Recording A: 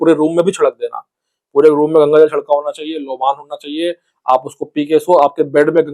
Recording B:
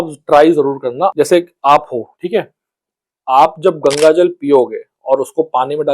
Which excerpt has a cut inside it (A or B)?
B